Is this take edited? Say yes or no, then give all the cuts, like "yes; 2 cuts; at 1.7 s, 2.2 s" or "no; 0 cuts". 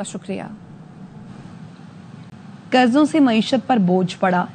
yes; 1 cut; at 2.3 s